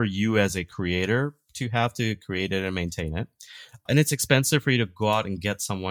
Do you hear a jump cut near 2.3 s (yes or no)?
no